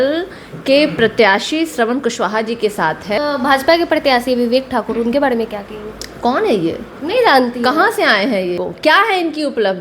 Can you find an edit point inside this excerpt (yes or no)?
yes